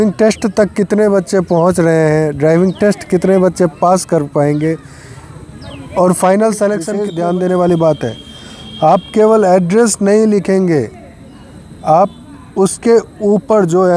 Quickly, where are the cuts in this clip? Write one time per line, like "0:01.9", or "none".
0:07.0

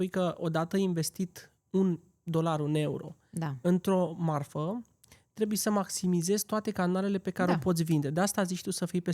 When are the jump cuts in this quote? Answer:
none

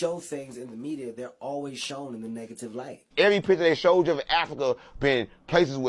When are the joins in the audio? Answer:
0:03.0

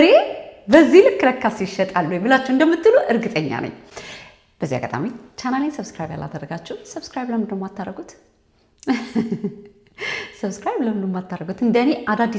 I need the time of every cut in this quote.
none

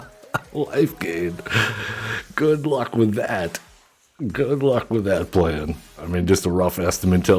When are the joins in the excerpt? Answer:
0:05.9

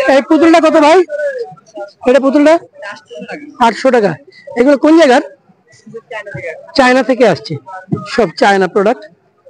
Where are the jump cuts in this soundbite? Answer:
none

